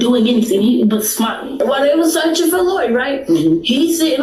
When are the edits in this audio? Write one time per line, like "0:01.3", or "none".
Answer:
0:01.6